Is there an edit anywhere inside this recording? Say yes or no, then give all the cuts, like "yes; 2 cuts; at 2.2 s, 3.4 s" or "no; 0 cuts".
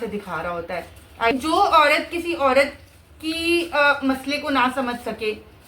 yes; 1 cut; at 1.3 s